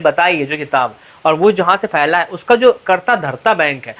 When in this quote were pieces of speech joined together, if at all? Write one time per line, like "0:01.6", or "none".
none

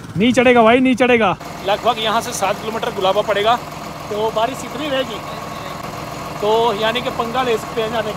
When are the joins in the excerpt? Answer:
0:01.5
0:05.9

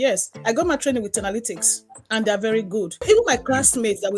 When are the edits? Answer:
0:02.9

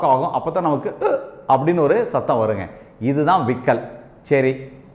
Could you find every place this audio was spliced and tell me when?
none

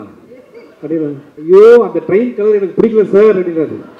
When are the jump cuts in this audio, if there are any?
0:01.3

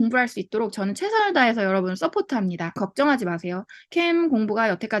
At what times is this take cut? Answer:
0:02.8

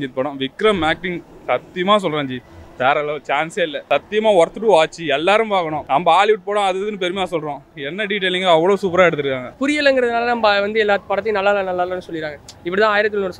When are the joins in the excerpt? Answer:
0:03.8
0:05.8
0:09.5

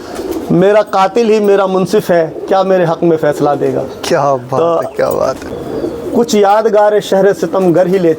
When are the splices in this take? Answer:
0:05.5

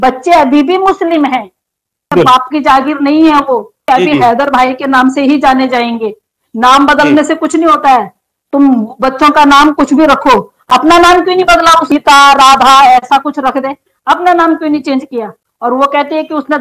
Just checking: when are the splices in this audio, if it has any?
0:02.1
0:03.8

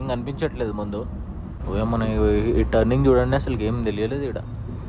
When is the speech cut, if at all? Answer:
0:01.6

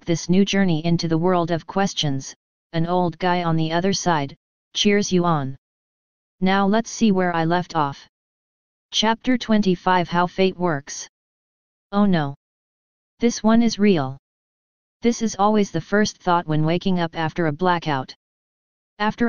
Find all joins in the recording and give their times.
0:17.8

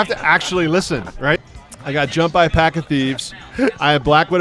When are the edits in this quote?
0:01.4

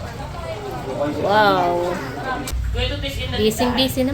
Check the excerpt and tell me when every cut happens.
0:02.5

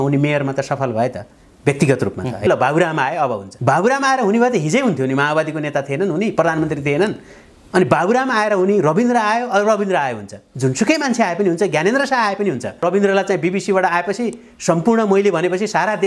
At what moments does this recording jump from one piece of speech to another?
0:02.5
0:10.4
0:12.8

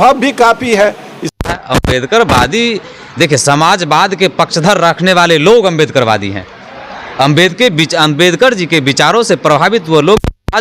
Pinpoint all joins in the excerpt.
0:01.2

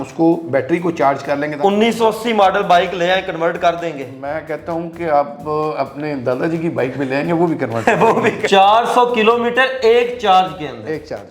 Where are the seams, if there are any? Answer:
0:01.5
0:08.4

